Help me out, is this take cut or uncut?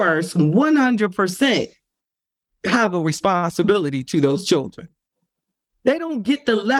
cut